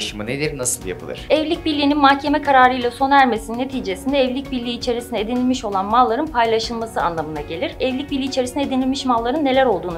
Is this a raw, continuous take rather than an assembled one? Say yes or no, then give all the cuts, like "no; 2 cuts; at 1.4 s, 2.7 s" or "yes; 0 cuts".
yes; 0 cuts